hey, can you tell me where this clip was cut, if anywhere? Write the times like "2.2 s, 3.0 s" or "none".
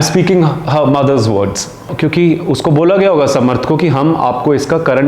1.9 s